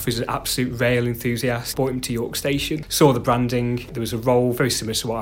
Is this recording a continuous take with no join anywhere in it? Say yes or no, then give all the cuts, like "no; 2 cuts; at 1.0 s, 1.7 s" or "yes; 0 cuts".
no; 3 cuts; at 1.7 s, 2.9 s, 4.0 s